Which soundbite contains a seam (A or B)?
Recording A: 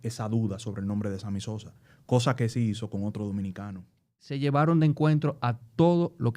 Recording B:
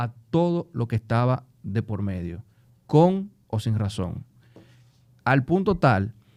A